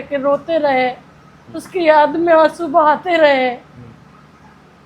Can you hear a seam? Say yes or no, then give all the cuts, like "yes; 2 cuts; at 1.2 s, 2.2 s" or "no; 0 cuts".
no; 0 cuts